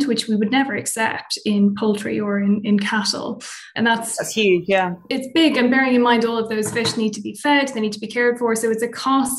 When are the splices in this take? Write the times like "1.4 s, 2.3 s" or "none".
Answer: 3.7 s, 5.0 s